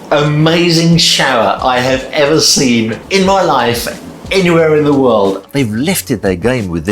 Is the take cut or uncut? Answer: cut